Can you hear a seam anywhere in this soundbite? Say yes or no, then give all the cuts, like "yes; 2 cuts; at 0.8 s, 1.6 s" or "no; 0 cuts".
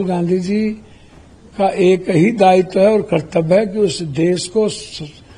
no; 0 cuts